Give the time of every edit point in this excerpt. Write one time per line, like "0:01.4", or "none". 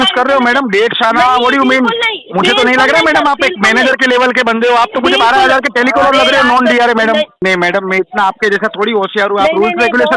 0:07.4